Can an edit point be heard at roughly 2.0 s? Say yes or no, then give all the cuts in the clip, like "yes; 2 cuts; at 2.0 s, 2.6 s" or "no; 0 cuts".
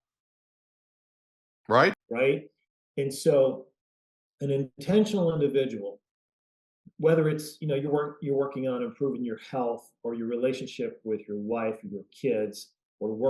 yes; 1 cut; at 2.0 s